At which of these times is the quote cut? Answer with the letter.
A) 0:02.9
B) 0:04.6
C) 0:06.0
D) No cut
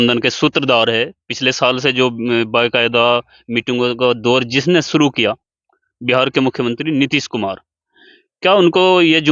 D